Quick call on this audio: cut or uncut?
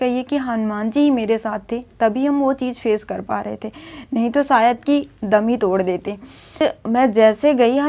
cut